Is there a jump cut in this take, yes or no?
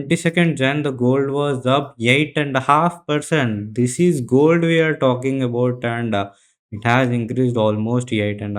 no